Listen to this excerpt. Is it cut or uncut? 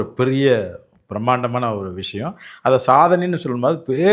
uncut